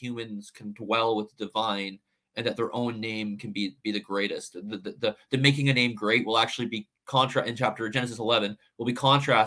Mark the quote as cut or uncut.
uncut